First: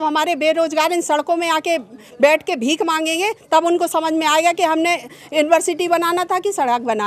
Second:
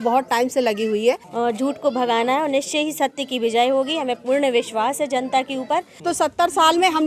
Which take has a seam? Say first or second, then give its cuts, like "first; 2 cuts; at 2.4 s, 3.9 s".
second; 2 cuts; at 1.3 s, 6.0 s